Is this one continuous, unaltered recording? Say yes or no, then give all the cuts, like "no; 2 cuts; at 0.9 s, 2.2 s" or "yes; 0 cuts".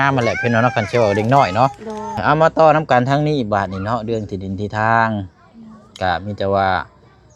no; 1 cut; at 2.2 s